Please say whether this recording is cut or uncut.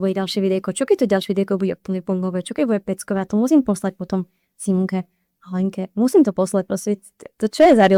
uncut